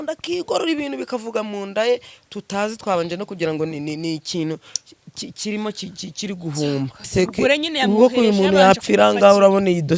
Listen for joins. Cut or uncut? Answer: cut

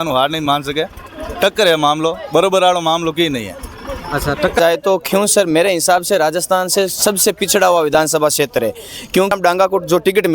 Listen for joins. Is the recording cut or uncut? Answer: cut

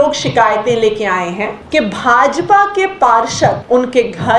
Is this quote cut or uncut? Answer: cut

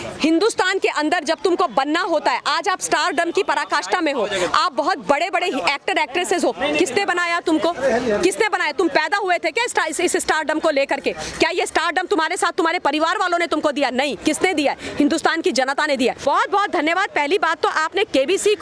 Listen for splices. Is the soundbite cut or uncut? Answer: cut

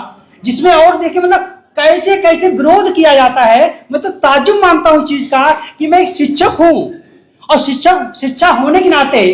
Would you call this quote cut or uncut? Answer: uncut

